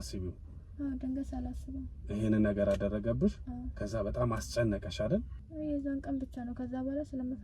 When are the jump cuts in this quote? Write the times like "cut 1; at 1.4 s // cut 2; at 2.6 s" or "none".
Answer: cut 1; at 5.3 s